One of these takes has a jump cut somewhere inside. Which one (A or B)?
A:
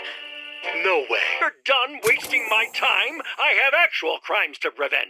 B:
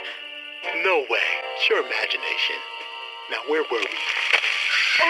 A